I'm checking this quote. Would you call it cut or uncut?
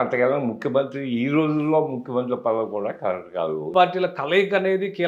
cut